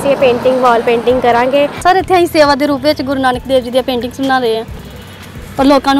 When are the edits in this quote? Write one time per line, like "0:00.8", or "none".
0:01.8